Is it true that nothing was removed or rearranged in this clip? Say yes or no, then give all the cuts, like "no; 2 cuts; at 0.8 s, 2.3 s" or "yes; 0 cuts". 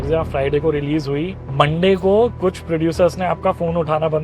no; 1 cut; at 1.4 s